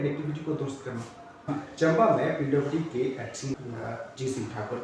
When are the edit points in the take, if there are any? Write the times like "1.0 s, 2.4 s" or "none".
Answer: 1.5 s, 3.5 s